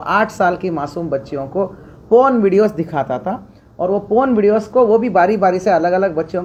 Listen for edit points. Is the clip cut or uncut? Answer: uncut